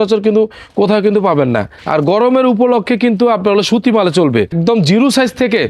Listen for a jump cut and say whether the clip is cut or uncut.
cut